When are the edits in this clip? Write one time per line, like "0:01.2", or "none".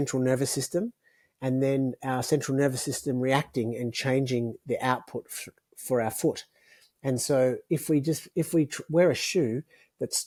none